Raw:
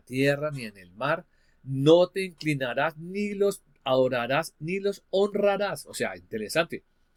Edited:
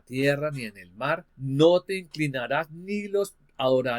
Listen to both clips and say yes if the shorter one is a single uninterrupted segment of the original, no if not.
no